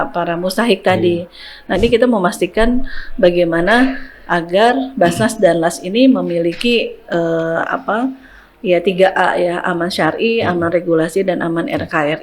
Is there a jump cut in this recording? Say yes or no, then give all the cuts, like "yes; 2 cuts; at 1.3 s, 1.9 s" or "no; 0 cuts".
yes; 1 cut; at 1.8 s